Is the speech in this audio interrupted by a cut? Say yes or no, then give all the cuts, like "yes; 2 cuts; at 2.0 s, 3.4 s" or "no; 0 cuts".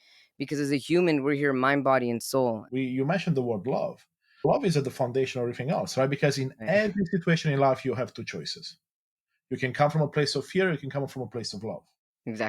yes; 2 cuts; at 2.6 s, 4.4 s